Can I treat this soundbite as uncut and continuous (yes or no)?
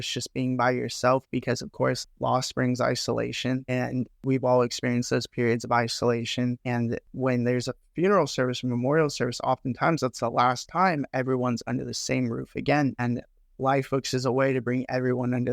no